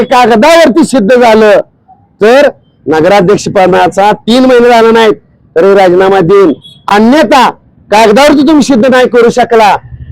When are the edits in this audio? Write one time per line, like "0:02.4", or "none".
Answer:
none

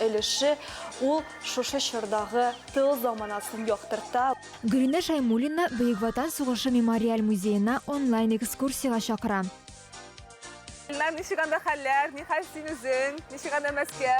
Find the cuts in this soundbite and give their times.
0:04.3

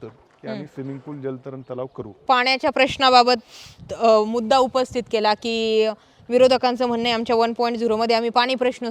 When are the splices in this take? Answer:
0:02.1

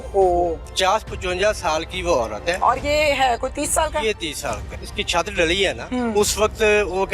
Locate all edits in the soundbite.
0:04.7

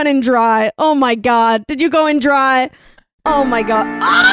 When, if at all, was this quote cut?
none

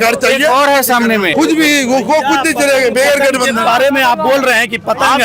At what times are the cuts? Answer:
0:01.3

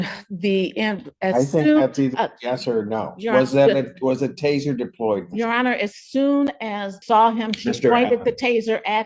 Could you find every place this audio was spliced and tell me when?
0:06.9

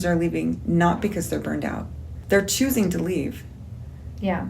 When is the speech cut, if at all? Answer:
0:02.1

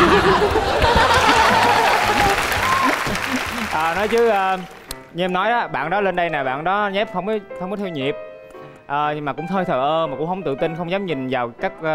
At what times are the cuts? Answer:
none

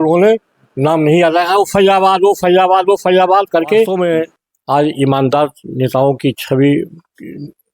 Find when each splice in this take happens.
0:03.9

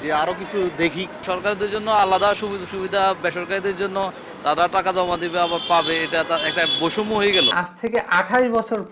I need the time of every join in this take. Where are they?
0:01.1
0:07.5

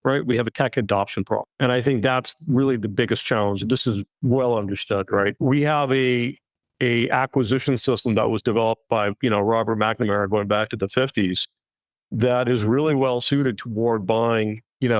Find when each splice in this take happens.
0:01.5

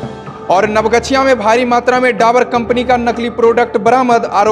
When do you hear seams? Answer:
none

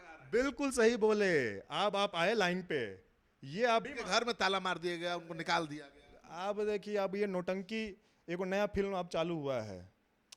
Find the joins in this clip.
0:03.8

